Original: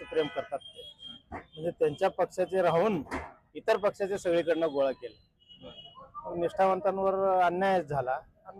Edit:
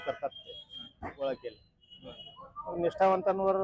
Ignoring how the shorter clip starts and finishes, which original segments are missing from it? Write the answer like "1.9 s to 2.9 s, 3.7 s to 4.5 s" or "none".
1.6 s to 4.9 s